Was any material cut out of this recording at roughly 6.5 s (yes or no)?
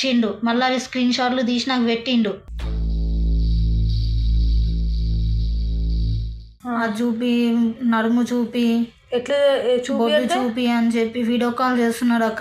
yes